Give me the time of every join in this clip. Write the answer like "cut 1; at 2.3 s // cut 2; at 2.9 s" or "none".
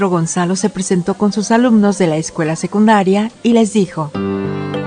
none